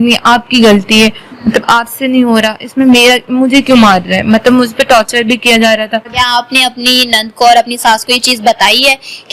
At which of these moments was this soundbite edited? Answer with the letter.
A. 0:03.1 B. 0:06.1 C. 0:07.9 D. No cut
B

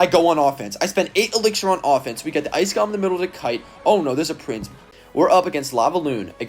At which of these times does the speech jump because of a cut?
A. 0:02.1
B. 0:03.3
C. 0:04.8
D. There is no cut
C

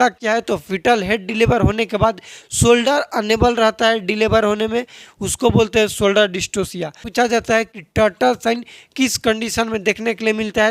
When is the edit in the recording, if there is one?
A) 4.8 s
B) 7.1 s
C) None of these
B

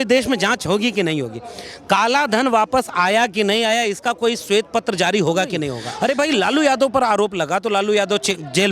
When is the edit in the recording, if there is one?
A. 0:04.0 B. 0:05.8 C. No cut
B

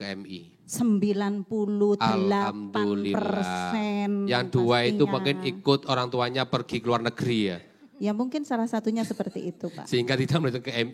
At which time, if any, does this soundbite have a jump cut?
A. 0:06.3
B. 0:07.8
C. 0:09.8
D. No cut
D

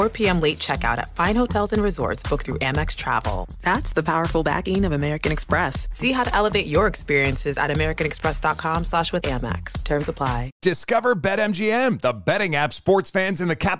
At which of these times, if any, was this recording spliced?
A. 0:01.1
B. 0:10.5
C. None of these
B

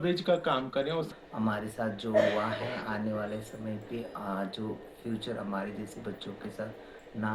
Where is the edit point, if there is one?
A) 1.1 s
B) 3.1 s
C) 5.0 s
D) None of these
A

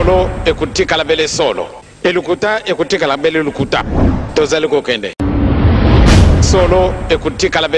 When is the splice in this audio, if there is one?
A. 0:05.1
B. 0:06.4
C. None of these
A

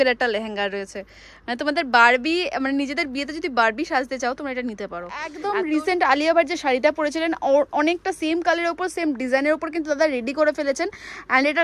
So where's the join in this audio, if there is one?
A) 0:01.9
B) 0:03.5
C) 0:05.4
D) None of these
C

